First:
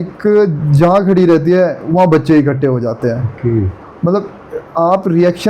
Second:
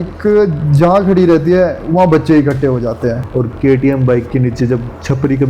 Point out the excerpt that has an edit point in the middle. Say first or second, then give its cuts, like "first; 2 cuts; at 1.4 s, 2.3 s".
second; 1 cut; at 3.2 s